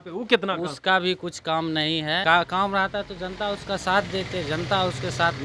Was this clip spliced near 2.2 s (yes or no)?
yes